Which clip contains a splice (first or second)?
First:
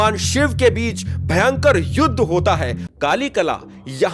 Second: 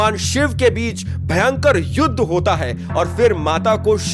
first